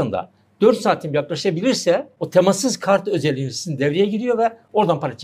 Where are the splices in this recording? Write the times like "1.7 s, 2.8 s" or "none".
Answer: 2.2 s